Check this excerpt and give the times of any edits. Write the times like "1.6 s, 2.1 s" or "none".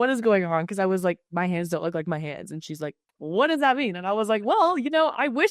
3.1 s